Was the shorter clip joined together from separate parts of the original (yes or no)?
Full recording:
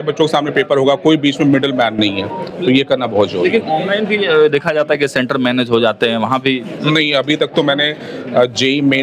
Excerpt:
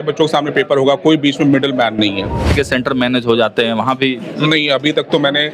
yes